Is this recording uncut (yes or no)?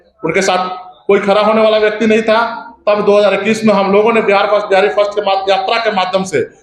yes